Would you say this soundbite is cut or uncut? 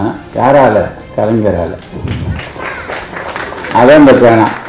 uncut